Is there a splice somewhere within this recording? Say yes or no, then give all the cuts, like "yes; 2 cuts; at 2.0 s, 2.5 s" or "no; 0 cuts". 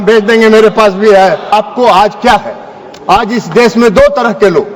yes; 1 cut; at 1.5 s